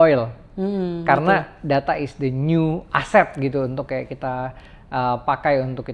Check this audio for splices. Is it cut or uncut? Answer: uncut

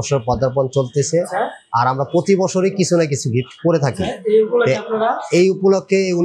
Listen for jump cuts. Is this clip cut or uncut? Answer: uncut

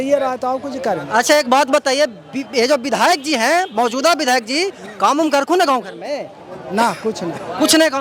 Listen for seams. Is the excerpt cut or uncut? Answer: uncut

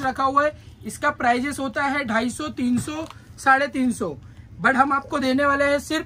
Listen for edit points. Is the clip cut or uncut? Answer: uncut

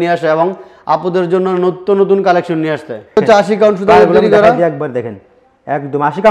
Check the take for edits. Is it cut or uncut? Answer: cut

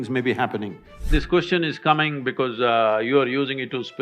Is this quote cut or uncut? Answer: cut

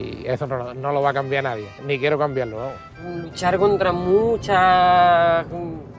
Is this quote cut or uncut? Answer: cut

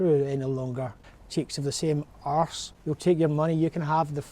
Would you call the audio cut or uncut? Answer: cut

